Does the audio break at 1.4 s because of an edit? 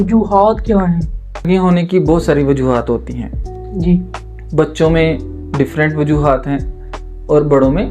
yes; 1 cut; at 1.4 s

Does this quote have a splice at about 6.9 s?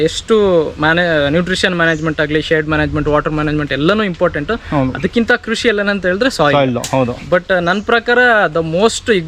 no; 0 cuts

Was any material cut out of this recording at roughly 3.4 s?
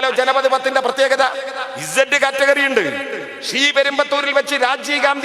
no; 0 cuts

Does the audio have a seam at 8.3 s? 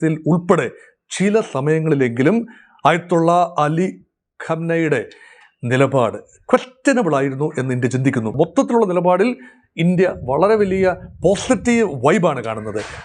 yes; 1 cut; at 8.3 s

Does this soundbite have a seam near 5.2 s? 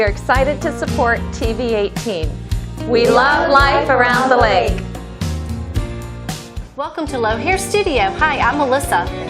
no; 1 cut; at 6.6 s

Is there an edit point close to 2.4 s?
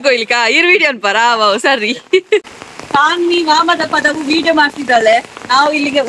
yes; 1 cut; at 2.4 s

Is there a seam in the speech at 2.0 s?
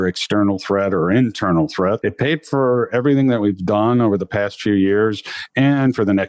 yes; 1 cut; at 2.0 s

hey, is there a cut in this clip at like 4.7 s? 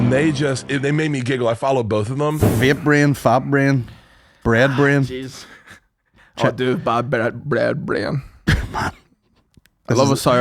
no; 1 cut; at 2.5 s

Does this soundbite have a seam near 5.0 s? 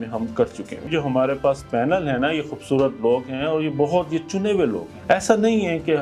yes; 2 cuts; at 0.9 s, 5.0 s

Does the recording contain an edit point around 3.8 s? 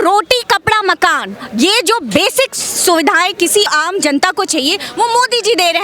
yes; 1 cut; at 3.8 s

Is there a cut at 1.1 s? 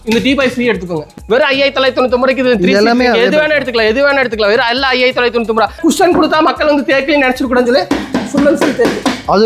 yes; 2 cuts; at 1.1 s, 5.8 s

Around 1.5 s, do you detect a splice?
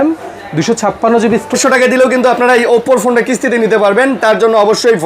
yes; 1 cut; at 1.5 s

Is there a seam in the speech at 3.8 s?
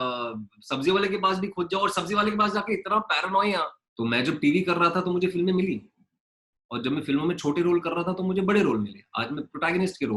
yes; 1 cut; at 3.8 s

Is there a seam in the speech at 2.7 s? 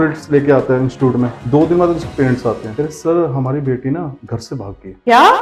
yes; 3 cuts; at 1.4 s, 2.7 s, 4.3 s

